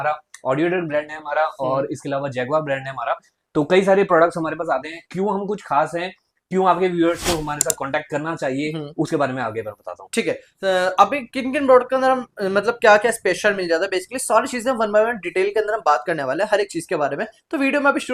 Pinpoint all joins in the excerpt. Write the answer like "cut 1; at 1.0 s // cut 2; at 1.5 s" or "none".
none